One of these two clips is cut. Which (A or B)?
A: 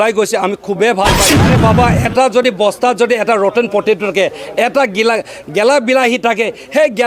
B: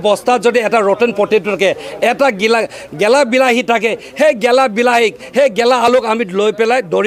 A